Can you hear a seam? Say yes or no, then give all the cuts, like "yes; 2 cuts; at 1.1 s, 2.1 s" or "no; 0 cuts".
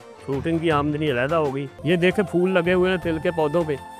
yes; 1 cut; at 1.7 s